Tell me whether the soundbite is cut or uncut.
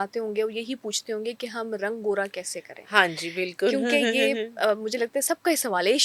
uncut